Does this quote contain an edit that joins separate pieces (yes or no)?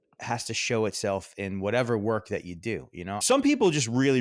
yes